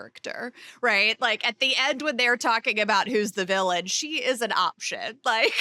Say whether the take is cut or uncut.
uncut